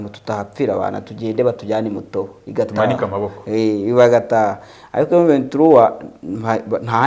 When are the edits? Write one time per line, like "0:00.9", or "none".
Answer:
none